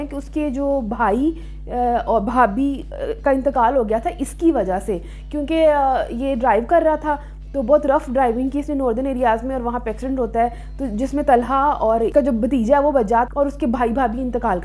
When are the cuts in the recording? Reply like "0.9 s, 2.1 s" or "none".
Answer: none